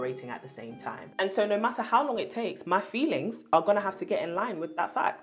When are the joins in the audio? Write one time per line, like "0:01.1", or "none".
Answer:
0:01.0